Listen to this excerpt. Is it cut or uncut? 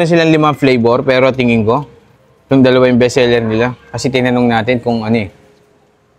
uncut